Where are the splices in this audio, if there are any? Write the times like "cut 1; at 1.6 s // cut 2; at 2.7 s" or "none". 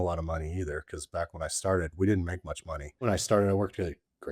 cut 1; at 3.1 s